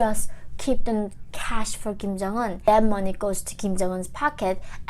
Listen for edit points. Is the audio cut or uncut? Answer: cut